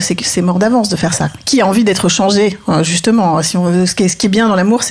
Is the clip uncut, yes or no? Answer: yes